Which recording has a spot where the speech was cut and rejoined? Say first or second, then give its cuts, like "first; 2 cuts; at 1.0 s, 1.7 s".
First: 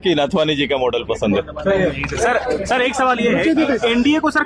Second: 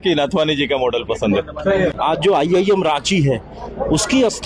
second; 1 cut; at 2.0 s